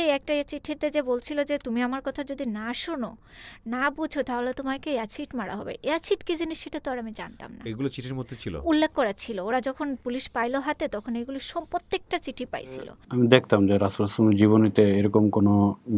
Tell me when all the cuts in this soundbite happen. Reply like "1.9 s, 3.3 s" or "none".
13.0 s